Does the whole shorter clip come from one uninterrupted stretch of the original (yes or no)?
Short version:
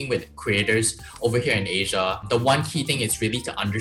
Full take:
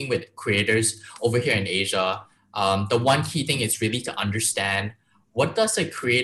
no